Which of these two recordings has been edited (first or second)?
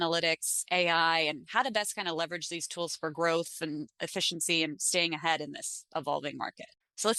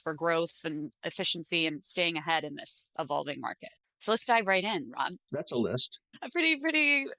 second